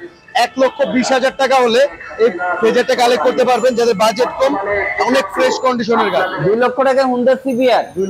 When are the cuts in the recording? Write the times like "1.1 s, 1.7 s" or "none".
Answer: 6.3 s